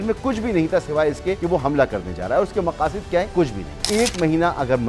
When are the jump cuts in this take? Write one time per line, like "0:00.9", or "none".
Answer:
0:01.4
0:03.5